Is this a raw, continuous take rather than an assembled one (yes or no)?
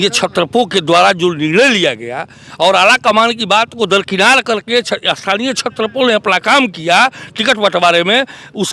yes